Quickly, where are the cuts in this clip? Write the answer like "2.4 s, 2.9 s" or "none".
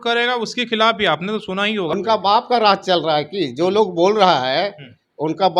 1.9 s